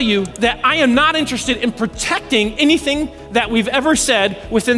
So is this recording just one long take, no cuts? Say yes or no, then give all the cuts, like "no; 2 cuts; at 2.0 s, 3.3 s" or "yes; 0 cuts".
yes; 0 cuts